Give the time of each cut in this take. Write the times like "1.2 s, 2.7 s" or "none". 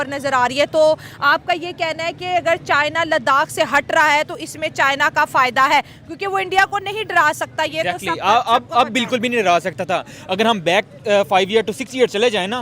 none